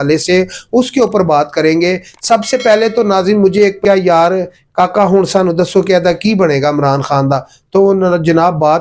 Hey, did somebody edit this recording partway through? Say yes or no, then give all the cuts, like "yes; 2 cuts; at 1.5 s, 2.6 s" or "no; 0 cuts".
yes; 1 cut; at 3.8 s